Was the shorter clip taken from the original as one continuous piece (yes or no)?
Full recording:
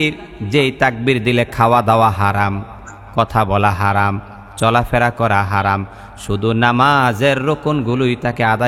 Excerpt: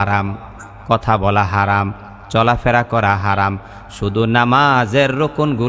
yes